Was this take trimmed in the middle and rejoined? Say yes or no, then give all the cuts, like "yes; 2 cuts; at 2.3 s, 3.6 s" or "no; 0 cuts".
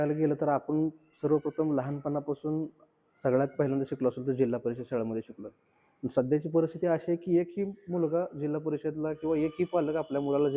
no; 0 cuts